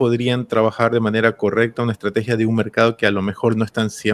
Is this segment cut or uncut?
uncut